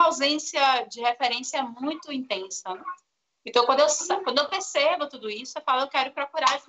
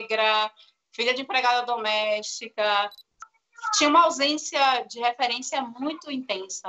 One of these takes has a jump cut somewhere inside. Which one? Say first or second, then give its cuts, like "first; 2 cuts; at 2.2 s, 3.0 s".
second; 1 cut; at 3.1 s